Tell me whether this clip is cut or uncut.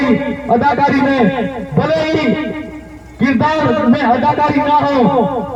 uncut